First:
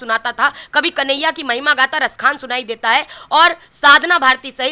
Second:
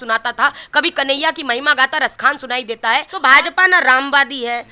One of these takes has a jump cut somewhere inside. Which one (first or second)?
second